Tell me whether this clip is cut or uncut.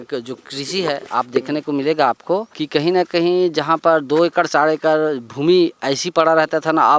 cut